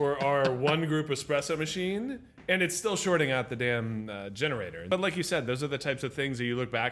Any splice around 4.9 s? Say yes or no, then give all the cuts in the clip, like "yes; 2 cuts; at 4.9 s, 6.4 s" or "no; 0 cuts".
yes; 1 cut; at 4.9 s